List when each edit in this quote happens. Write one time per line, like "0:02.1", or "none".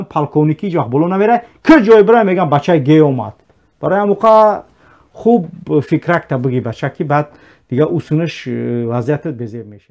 none